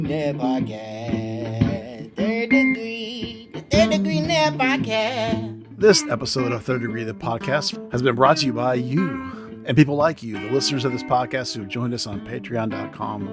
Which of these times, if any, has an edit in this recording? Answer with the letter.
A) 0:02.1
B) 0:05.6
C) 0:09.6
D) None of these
B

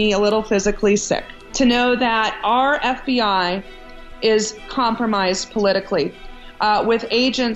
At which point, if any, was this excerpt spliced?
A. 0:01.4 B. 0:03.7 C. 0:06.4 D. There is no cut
A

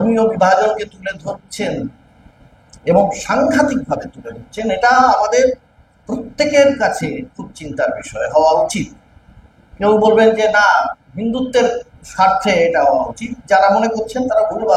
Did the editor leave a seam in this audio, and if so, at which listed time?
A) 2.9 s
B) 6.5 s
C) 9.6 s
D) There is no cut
D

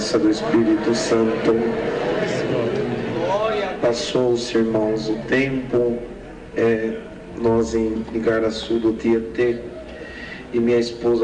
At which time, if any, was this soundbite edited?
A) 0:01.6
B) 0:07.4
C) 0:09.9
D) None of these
C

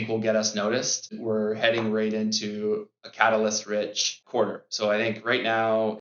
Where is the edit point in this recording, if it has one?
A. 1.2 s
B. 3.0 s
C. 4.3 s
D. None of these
A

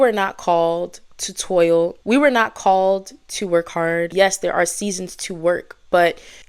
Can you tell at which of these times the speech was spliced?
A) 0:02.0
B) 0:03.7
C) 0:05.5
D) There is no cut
A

